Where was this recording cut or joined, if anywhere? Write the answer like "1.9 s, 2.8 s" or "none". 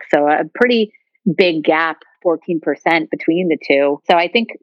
none